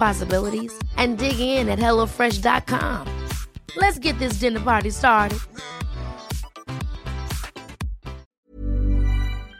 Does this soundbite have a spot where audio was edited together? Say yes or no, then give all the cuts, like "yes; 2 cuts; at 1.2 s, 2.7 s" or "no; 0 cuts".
yes; 1 cut; at 8.5 s